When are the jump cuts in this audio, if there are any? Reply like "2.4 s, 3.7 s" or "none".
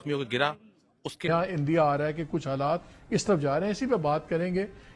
1.3 s